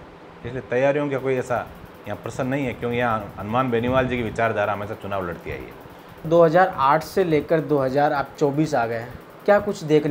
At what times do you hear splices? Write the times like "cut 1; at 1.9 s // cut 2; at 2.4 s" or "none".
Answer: cut 1; at 6.2 s

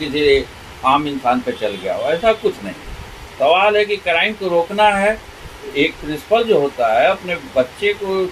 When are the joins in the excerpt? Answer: none

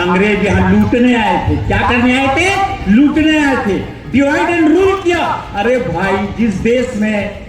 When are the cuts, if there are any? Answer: none

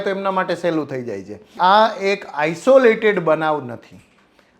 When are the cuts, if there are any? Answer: cut 1; at 1.6 s

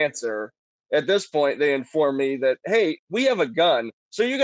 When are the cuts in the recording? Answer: none

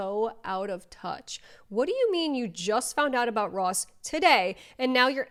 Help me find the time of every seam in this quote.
none

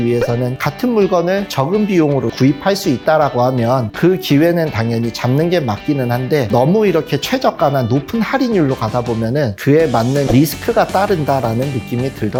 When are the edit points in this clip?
none

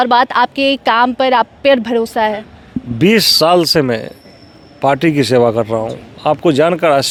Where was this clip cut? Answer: none

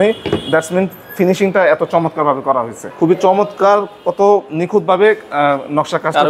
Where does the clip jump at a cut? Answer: cut 1; at 2.8 s

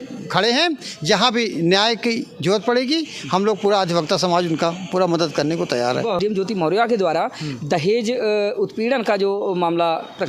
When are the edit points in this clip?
cut 1; at 6.2 s

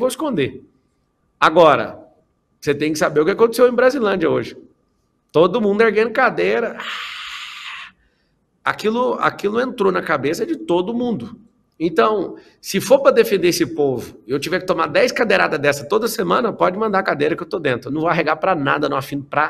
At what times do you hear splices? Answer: none

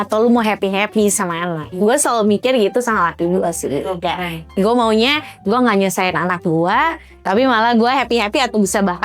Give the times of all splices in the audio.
none

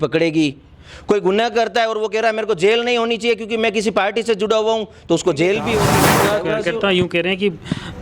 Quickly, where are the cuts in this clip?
cut 1; at 6.2 s

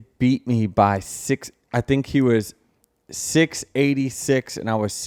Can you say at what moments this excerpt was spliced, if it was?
none

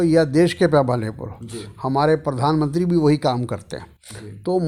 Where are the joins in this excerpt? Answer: none

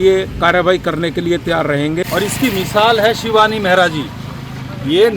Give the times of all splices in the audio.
cut 1; at 2.0 s

